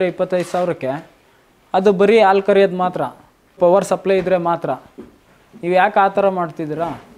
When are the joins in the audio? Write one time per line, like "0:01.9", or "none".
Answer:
0:03.6